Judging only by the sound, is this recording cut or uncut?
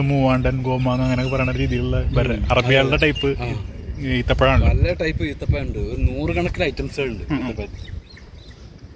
uncut